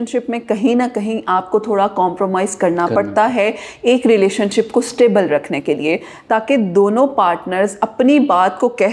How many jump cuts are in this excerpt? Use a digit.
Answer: 0